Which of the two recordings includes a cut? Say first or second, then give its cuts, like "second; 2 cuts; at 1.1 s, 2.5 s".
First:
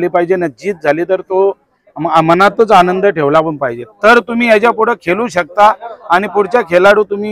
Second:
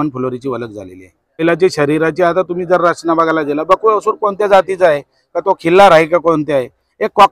second; 1 cut; at 1.4 s